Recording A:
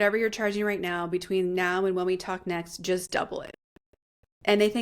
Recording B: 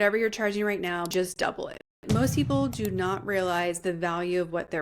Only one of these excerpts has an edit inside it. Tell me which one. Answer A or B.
B